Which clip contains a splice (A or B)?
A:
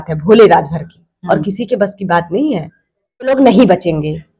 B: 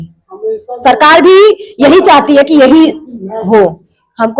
A